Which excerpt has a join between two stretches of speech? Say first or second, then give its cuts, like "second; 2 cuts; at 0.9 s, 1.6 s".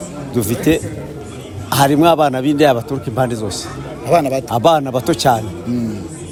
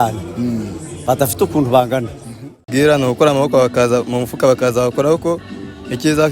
second; 1 cut; at 2.7 s